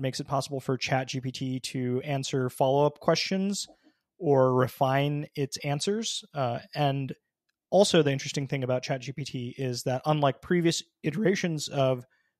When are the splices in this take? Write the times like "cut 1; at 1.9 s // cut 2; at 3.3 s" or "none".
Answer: none